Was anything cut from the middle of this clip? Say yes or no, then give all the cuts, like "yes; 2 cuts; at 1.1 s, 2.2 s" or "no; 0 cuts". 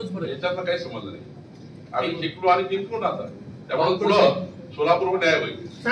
no; 0 cuts